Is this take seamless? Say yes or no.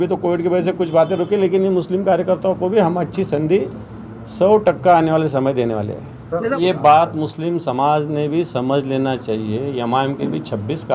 no